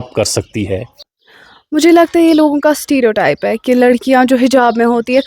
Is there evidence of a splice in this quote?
yes; 1 cut; at 1.0 s

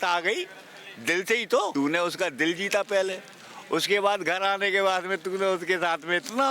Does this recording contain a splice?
yes; 1 cut; at 1.7 s

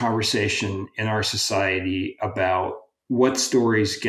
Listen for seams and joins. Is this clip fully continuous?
no; 1 cut; at 2.9 s

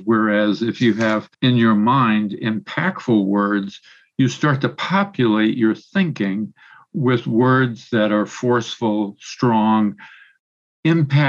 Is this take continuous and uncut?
no; 1 cut; at 1.3 s

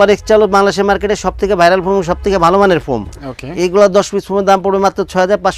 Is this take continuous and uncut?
yes; 0 cuts

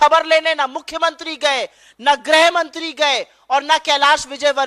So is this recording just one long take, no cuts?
yes; 0 cuts

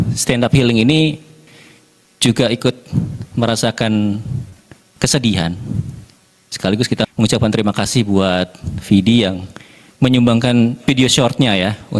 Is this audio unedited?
yes; 0 cuts

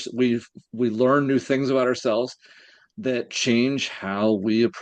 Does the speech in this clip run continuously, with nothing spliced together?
yes; 0 cuts

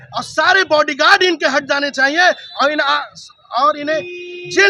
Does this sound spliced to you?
no; 0 cuts

